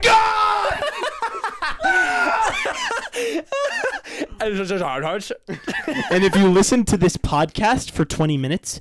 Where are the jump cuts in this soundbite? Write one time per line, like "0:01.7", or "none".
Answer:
none